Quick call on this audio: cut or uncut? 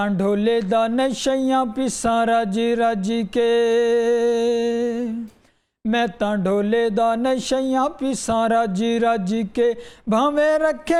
uncut